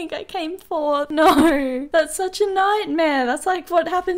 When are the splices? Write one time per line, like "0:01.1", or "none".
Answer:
0:01.1
0:01.8